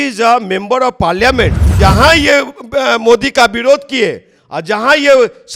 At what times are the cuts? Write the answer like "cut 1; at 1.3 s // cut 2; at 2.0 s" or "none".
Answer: cut 1; at 1.7 s